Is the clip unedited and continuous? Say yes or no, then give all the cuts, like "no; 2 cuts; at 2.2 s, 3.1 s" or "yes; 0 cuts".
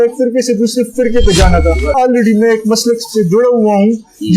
no; 1 cut; at 1.9 s